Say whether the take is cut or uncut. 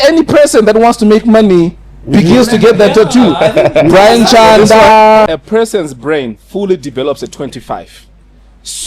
cut